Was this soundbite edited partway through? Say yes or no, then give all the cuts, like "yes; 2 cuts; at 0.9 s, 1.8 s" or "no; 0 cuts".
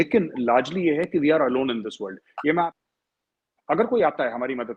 yes; 1 cut; at 2.7 s